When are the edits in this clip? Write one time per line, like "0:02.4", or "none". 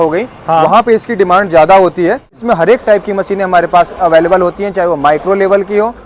0:02.3